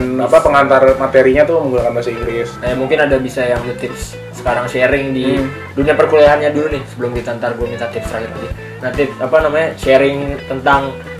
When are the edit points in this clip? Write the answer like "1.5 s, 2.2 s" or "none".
none